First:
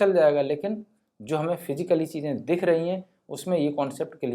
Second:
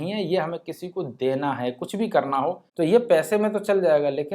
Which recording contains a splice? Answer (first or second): second